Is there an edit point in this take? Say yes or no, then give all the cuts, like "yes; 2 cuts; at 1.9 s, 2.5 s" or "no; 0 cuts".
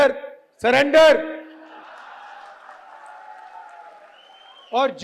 yes; 1 cut; at 1.8 s